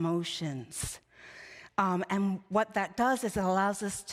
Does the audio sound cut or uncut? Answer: uncut